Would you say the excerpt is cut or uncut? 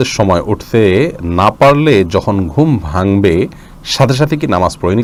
uncut